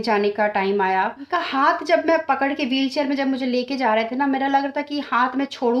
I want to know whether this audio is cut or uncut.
cut